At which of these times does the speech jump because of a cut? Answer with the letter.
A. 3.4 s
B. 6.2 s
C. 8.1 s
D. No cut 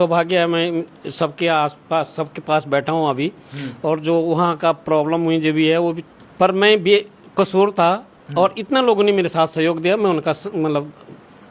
B